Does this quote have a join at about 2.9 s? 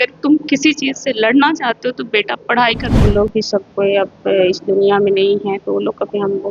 yes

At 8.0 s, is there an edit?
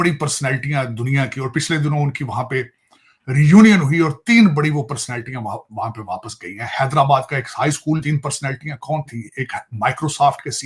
yes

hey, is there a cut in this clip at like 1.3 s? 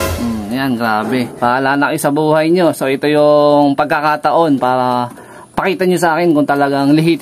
yes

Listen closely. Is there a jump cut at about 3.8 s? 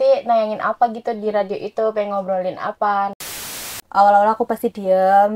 yes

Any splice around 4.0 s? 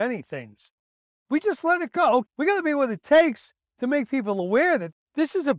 no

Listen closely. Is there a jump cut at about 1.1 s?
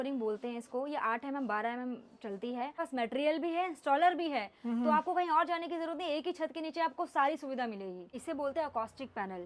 no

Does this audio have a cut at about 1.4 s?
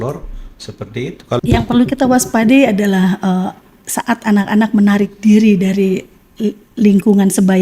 yes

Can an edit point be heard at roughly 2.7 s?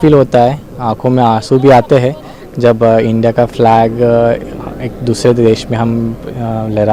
no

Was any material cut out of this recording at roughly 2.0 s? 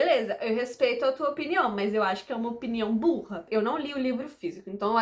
no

